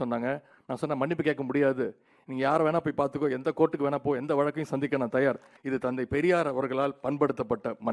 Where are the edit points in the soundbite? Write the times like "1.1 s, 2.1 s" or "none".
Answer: 5.5 s

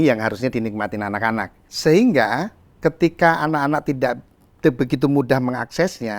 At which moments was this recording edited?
1.6 s

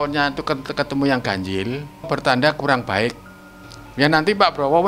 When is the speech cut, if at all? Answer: 2.1 s

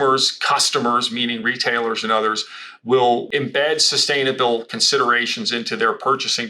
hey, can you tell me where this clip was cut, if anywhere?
3.3 s

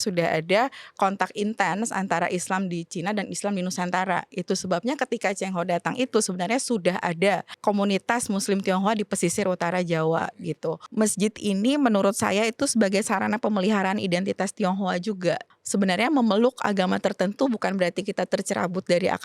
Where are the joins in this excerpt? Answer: 10.8 s

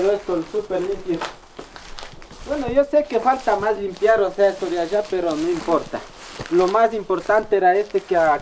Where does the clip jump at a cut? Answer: none

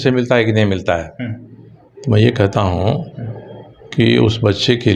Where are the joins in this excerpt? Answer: none

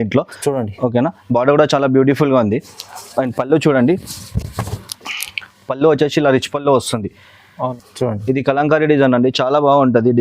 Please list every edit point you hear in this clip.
7.7 s

